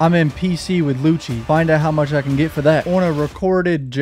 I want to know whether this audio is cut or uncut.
cut